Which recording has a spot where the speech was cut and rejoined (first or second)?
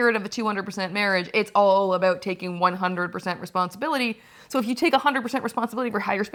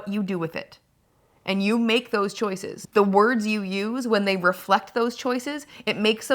second